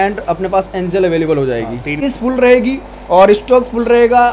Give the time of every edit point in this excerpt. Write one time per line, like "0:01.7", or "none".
0:02.0